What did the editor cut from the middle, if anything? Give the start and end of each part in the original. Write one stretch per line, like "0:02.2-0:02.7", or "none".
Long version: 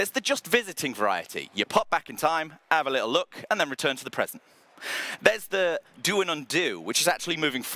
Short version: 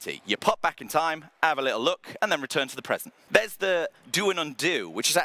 0:04.4-0:05.1

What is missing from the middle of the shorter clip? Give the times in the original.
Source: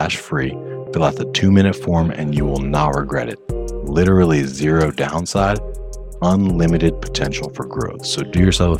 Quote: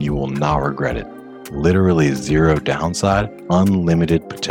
0:05.7-0:06.1

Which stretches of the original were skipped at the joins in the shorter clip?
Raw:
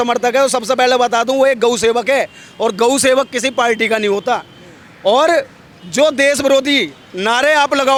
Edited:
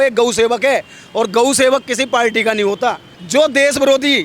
0:04.6-0:05.8

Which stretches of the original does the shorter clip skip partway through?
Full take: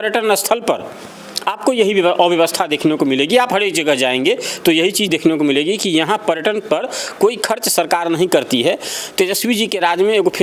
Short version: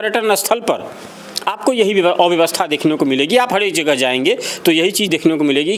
none

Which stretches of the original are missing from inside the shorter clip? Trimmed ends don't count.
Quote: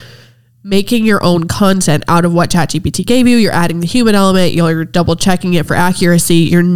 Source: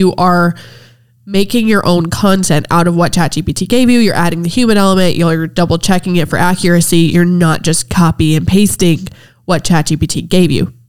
none

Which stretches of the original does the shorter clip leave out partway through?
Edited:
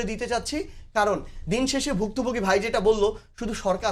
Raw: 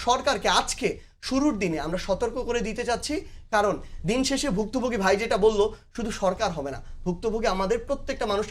none

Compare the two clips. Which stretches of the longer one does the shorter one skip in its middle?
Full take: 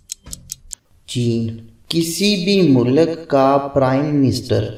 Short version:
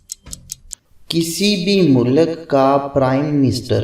0:00.9-0:01.7

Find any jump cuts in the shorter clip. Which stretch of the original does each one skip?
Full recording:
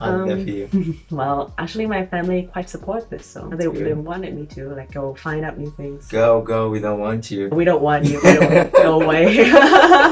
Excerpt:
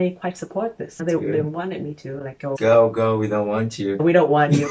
0:03.2-0:03.4
0:05.1-0:06.1

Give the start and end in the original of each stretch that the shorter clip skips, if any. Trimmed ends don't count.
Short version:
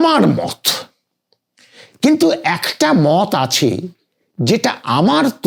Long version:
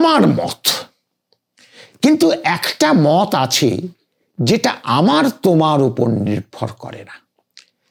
none

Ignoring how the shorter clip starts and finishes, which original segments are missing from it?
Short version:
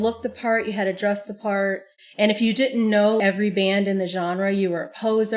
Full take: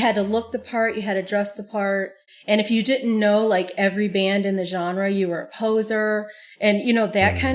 0:03.5-0:03.8

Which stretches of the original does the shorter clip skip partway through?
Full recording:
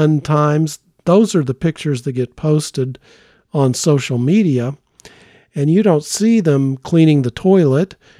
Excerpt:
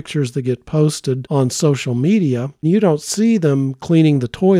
0:02.9-0:03.5
0:04.8-0:05.6

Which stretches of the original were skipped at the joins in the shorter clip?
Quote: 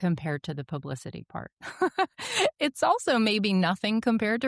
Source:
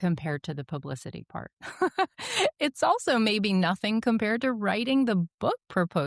none

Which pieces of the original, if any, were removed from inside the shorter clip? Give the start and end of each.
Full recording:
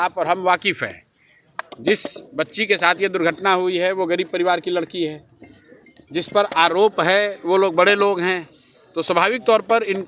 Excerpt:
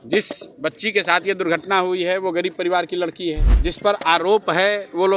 0:05.2-0:06.0

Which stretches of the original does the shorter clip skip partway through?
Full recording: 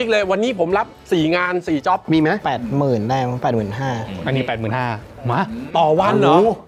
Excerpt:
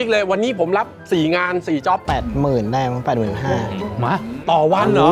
0:02.0-0:02.4
0:04.1-0:05.0

